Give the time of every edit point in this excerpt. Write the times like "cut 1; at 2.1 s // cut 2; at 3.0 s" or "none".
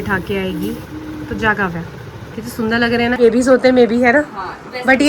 cut 1; at 3.2 s

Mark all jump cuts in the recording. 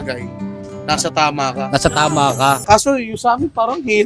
cut 1; at 2.6 s

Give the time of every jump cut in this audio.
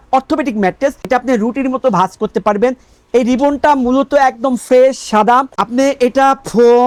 none

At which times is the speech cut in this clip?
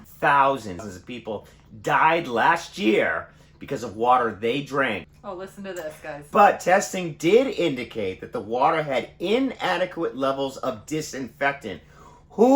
cut 1; at 0.9 s // cut 2; at 5.1 s

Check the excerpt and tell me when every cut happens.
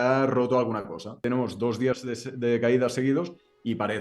cut 1; at 1.2 s

